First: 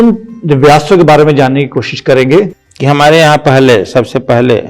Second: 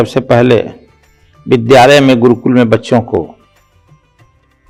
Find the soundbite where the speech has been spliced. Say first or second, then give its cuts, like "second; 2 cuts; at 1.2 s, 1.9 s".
first; 1 cut; at 2.6 s